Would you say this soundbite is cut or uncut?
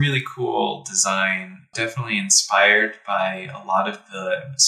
cut